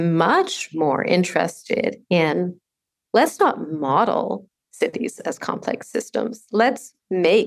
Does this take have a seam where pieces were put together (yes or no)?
no